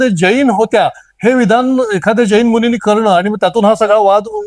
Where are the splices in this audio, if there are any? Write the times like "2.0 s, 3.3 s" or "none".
none